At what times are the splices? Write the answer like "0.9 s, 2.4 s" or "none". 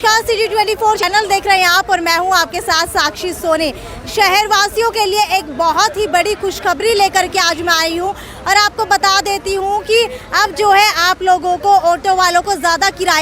1.0 s